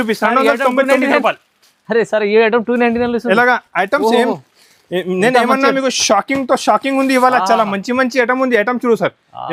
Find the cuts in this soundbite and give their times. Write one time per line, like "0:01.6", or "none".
none